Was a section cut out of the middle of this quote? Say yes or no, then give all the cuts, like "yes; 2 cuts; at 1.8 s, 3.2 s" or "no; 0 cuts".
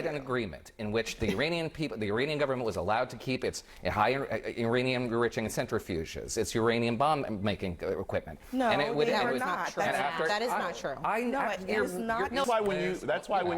yes; 1 cut; at 12.4 s